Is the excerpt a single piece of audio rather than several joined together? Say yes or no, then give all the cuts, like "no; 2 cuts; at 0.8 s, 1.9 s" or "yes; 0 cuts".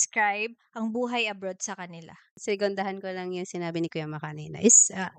no; 1 cut; at 2.4 s